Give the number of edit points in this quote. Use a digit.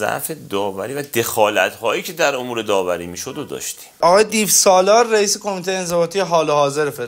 1